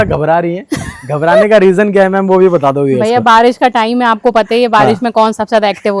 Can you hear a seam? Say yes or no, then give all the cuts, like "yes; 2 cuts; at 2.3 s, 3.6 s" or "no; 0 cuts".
no; 0 cuts